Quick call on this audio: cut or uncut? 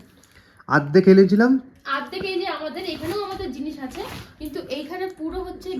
uncut